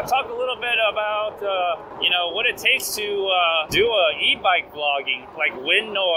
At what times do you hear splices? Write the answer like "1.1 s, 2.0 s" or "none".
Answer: 1.9 s, 3.7 s, 5.2 s

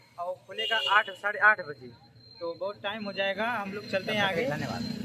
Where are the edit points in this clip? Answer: none

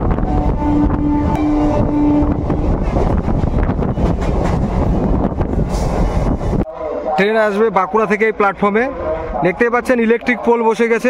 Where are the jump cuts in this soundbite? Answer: 1.3 s, 6.7 s

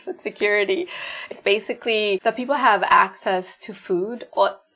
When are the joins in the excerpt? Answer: 2.2 s

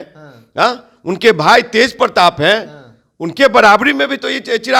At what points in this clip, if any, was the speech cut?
none

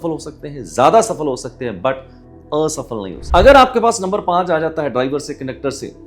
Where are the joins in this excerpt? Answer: 3.2 s

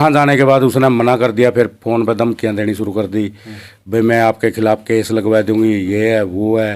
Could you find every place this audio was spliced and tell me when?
none

